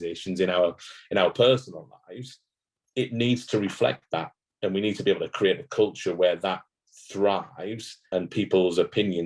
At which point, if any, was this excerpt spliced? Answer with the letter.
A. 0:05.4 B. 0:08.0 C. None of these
B